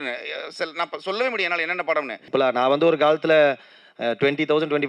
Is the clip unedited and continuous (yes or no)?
no